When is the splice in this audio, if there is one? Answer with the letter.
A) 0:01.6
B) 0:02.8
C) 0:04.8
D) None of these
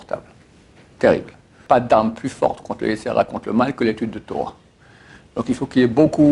A